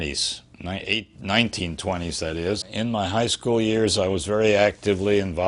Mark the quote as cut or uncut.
cut